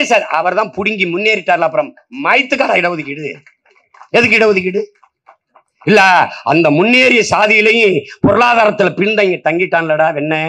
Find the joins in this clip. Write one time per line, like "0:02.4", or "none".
none